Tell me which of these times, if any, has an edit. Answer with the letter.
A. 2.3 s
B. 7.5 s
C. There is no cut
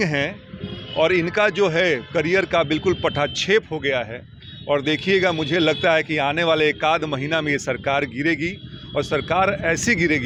C